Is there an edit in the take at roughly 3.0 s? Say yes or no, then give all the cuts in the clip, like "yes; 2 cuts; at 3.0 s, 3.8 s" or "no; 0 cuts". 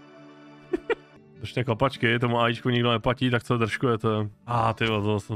no; 2 cuts; at 1.2 s, 4.5 s